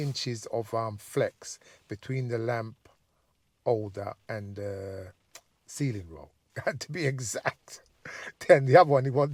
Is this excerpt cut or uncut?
uncut